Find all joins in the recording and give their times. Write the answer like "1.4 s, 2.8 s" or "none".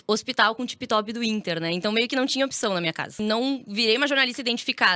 3.1 s